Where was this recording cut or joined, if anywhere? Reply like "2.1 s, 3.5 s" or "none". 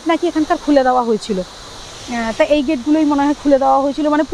none